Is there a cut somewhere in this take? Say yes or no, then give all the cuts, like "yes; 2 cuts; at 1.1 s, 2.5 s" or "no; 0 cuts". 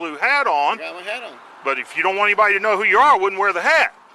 no; 0 cuts